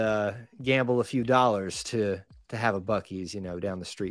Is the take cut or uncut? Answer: uncut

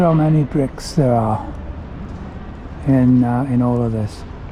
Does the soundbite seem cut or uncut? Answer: uncut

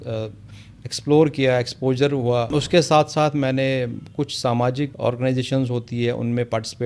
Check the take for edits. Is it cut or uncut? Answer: cut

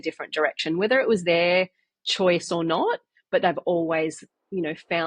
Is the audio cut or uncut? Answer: uncut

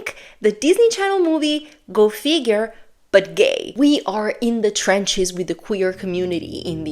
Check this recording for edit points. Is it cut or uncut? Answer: cut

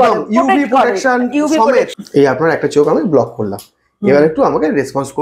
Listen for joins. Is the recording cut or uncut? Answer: cut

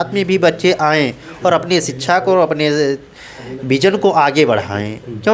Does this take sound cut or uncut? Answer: uncut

